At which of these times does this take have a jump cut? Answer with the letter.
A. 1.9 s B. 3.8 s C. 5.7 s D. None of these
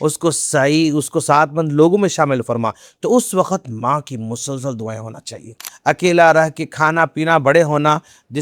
C